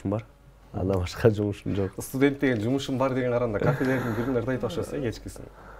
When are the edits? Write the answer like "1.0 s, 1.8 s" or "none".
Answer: none